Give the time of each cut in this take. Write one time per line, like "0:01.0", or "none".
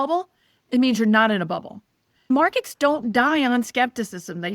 0:02.3